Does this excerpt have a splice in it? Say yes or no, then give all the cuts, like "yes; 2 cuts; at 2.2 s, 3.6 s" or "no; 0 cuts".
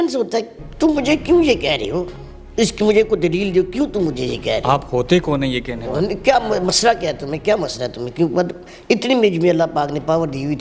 no; 0 cuts